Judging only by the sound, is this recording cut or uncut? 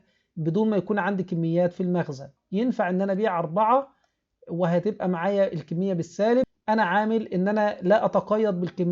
cut